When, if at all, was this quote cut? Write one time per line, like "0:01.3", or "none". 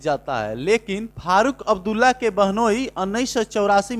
0:01.1